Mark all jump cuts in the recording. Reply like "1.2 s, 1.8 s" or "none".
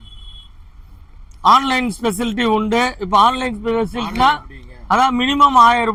none